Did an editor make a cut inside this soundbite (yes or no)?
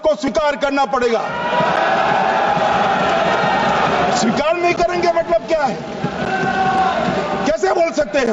no